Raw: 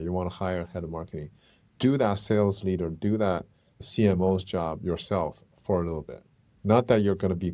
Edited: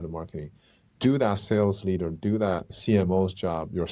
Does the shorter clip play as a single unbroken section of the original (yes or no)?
no